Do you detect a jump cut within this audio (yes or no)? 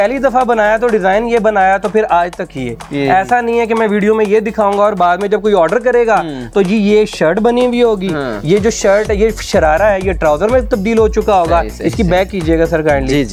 no